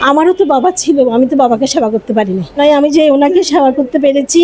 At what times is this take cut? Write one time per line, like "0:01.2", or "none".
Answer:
0:02.6

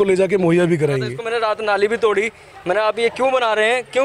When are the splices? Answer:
0:01.2

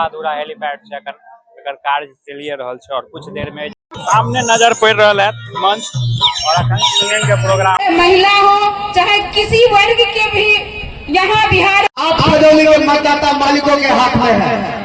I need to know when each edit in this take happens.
0:03.7
0:07.8
0:11.9

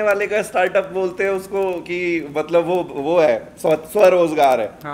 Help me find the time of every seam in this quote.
none

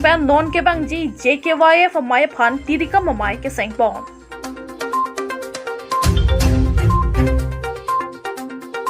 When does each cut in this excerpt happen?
0:04.2
0:07.2

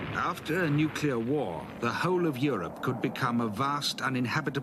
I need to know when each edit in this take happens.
none

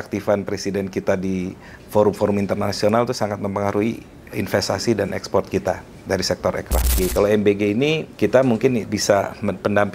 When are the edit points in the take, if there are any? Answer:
0:07.0
0:08.1
0:08.9

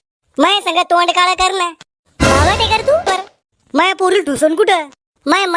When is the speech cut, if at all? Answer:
0:03.1

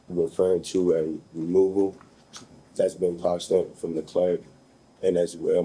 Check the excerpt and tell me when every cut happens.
none

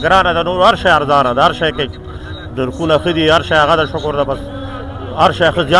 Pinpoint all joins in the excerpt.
none

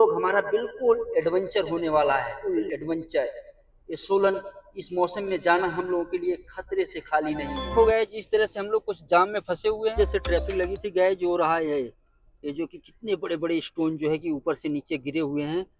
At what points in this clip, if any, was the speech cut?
0:02.3
0:07.7
0:10.0

